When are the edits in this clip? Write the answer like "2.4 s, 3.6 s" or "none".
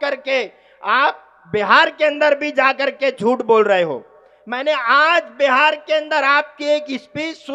none